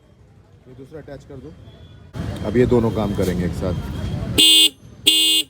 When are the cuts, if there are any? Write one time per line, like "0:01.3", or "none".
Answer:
0:02.1